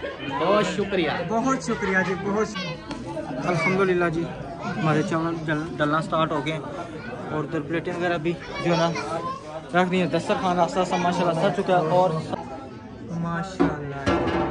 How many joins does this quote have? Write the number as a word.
two